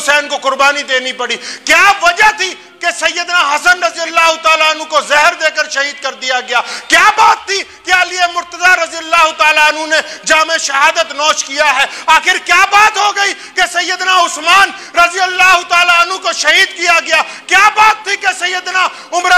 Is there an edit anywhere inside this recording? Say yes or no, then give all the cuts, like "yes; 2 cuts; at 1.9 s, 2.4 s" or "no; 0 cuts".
no; 0 cuts